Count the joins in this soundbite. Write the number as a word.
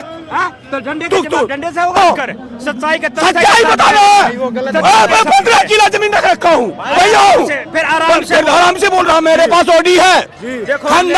two